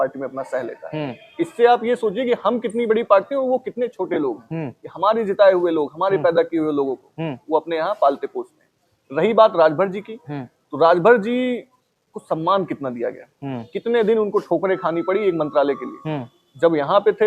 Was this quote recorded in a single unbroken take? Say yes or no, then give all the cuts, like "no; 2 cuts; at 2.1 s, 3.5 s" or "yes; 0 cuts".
yes; 0 cuts